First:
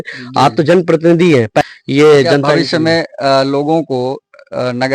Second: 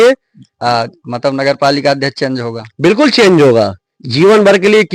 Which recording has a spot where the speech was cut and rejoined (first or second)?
first